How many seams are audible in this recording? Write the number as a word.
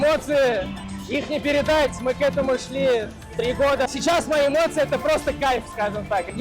one